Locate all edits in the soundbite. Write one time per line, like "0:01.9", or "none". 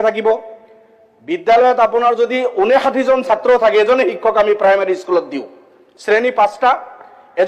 none

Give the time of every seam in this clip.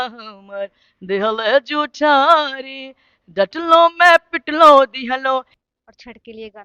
0:05.6

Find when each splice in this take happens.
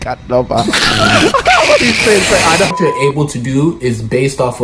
0:02.7

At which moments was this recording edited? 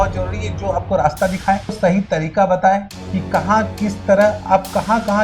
0:01.8

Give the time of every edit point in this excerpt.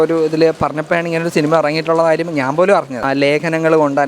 0:03.0

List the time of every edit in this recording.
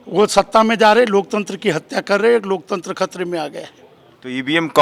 none

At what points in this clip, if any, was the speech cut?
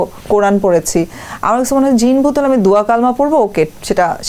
none

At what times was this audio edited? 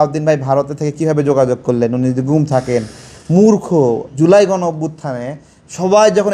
0:04.1

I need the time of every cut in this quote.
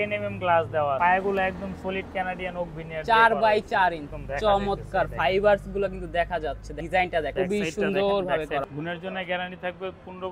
0:01.0
0:04.2
0:06.7
0:07.3
0:08.6

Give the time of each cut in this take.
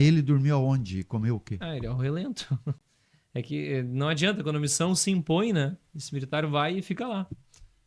none

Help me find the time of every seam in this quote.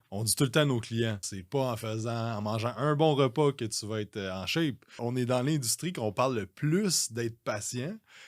0:01.3
0:05.0

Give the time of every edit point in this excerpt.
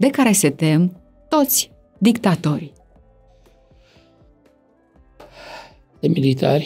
none

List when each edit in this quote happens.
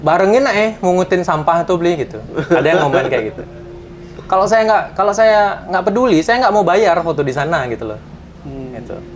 none

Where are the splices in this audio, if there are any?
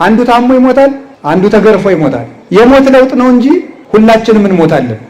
0:01.1
0:02.3
0:03.7

